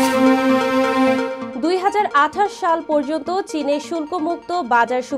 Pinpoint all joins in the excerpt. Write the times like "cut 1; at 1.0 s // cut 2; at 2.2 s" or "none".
cut 1; at 1.4 s